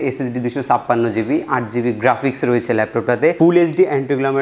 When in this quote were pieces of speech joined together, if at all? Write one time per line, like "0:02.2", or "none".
0:03.4